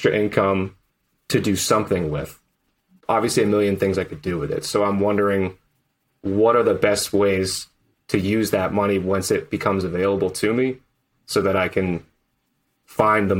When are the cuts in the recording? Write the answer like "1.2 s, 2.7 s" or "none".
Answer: 2.9 s